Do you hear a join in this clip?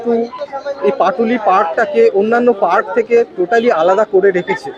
no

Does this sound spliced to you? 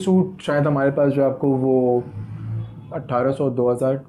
no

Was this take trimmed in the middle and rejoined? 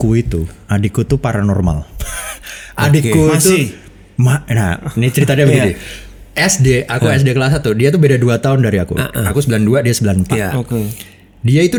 no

